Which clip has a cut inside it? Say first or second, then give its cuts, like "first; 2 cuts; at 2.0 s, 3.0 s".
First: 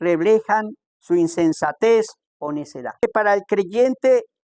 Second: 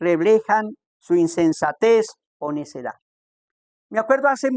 first; 1 cut; at 3.0 s